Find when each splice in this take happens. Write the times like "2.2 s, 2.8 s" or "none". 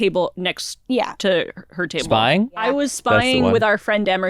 2.6 s